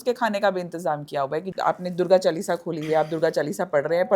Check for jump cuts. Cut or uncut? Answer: cut